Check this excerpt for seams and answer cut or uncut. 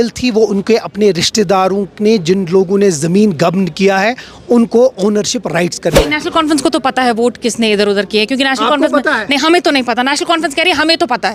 cut